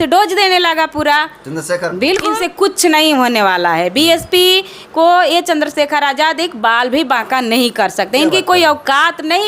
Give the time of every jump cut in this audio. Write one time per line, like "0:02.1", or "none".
0:02.4